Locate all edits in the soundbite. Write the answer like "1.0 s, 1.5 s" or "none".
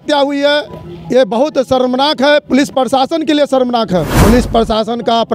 4.1 s